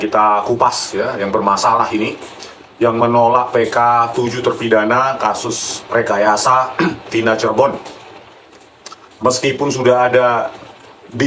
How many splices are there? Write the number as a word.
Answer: zero